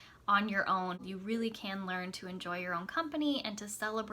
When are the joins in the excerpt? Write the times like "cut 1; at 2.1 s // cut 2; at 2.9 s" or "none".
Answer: cut 1; at 1.0 s